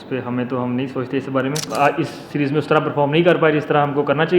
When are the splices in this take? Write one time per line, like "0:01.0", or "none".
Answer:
0:01.6